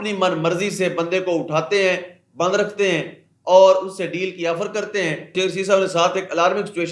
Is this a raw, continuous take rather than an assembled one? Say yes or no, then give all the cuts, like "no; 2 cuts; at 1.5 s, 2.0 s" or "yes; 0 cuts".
no; 1 cut; at 5.3 s